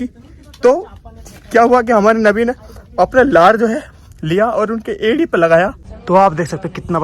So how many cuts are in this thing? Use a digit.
1